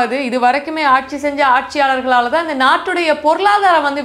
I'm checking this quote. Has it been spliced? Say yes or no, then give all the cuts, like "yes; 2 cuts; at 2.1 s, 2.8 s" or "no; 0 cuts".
no; 0 cuts